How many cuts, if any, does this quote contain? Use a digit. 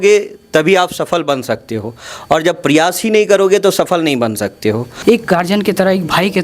1